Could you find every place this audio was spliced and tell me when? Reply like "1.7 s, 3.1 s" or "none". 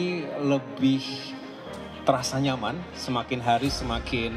none